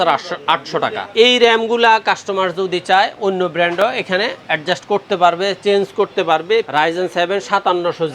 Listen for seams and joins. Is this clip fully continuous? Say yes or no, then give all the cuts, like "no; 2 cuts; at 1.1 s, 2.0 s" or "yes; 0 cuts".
no; 2 cuts; at 1.0 s, 6.7 s